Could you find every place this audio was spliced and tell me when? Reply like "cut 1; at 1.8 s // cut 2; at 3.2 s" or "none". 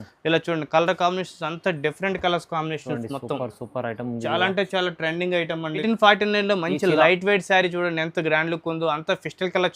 cut 1; at 5.8 s